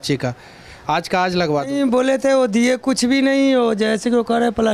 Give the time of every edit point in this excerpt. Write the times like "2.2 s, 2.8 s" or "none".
1.7 s